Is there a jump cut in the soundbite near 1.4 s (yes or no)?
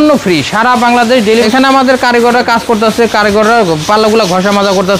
yes